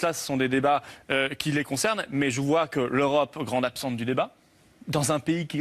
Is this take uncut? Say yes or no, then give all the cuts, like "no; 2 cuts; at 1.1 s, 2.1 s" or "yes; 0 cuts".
no; 1 cut; at 2.0 s